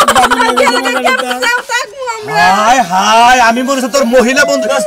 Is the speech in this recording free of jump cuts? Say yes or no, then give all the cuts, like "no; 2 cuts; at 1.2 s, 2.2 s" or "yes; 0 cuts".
yes; 0 cuts